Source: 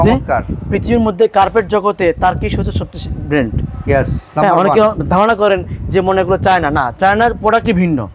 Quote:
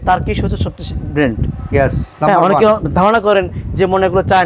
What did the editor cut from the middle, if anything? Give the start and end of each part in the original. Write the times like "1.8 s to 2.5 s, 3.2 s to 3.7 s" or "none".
none